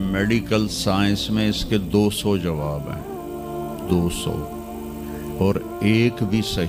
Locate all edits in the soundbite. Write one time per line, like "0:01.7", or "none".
none